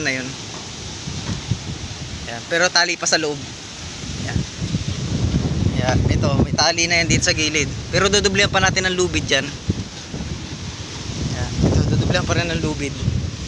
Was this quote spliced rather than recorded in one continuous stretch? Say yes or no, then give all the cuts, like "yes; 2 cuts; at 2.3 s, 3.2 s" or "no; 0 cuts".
no; 0 cuts